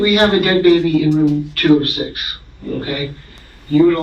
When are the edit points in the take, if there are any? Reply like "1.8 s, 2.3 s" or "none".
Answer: none